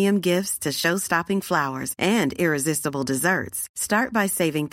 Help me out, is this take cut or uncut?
uncut